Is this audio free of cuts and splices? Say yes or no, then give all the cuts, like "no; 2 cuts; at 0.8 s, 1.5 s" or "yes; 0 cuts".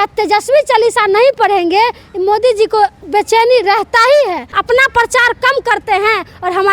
no; 1 cut; at 4.5 s